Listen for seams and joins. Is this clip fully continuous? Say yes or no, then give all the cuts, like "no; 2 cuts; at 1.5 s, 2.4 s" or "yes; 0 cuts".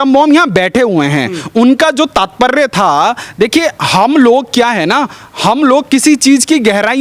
yes; 0 cuts